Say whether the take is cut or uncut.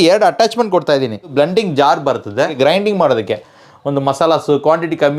cut